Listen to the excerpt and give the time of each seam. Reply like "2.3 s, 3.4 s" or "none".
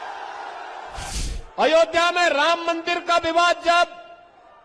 1.1 s